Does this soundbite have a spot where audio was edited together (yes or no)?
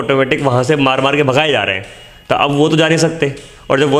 no